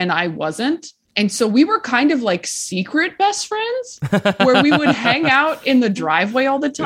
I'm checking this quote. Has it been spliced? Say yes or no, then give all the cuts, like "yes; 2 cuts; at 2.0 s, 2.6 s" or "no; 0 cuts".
yes; 1 cut; at 1.0 s